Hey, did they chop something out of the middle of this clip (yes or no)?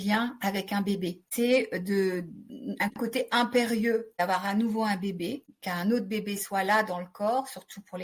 yes